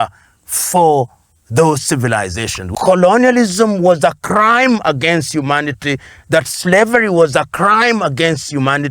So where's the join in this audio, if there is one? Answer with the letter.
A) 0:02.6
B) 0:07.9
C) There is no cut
A